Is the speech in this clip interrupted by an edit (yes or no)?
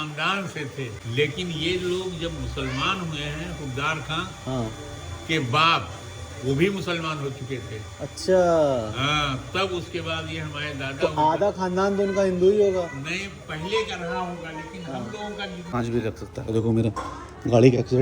yes